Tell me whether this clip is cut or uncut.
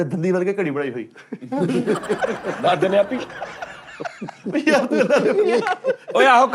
uncut